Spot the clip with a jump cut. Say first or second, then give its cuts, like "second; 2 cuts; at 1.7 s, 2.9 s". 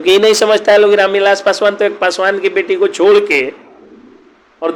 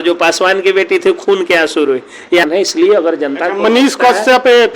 second; 1 cut; at 2.4 s